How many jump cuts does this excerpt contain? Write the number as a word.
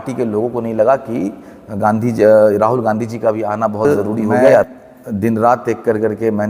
one